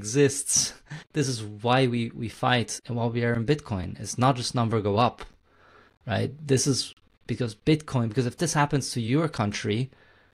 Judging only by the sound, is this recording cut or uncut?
cut